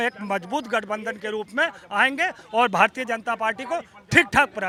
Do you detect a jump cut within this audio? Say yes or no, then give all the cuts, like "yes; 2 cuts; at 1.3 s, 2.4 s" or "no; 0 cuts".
no; 0 cuts